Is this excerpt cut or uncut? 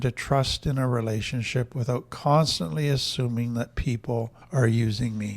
cut